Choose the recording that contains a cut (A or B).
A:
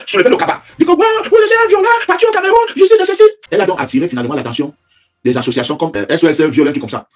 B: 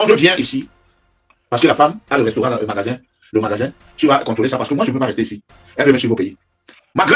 A